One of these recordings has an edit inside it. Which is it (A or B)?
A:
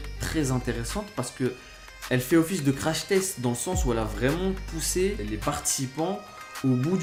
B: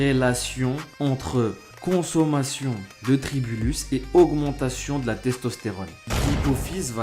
B